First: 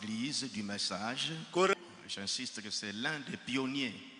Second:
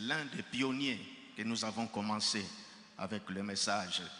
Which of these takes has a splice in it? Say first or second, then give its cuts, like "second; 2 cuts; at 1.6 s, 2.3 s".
first; 1 cut; at 1.7 s